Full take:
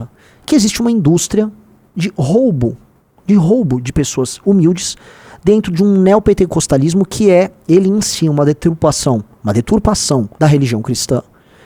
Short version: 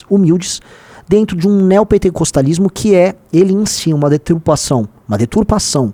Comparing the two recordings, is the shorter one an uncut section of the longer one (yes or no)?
yes